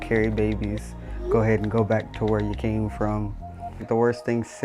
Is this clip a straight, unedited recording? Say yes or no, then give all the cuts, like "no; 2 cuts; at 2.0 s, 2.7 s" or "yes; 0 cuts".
no; 1 cut; at 3.7 s